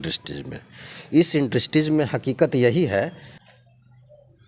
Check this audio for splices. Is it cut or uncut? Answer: cut